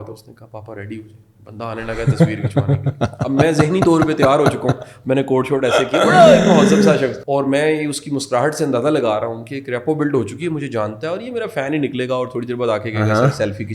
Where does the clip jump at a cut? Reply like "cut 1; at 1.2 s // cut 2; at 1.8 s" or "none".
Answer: cut 1; at 7.2 s